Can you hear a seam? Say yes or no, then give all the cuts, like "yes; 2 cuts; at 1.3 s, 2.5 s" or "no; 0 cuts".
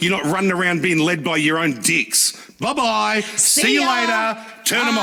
no; 0 cuts